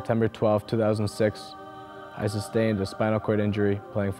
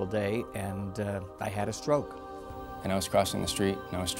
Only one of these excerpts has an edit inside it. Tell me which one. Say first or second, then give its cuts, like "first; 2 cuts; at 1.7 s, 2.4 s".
second; 1 cut; at 2.7 s